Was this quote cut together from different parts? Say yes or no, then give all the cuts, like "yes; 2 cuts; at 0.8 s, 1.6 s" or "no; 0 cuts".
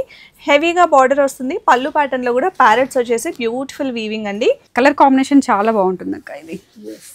yes; 1 cut; at 4.6 s